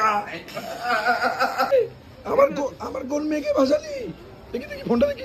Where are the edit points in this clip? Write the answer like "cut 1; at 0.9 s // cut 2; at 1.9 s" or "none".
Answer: cut 1; at 1.7 s